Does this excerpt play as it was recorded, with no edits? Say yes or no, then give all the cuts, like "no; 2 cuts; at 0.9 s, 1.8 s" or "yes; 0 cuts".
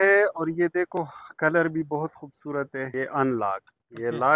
no; 1 cut; at 2.9 s